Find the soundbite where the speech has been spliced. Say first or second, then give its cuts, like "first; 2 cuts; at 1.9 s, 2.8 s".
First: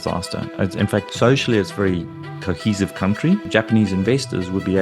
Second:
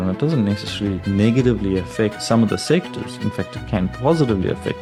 first; 2 cuts; at 1.1 s, 3.4 s